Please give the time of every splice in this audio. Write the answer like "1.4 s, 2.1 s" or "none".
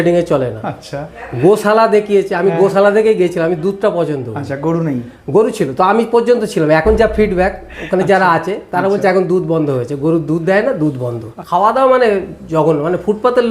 11.3 s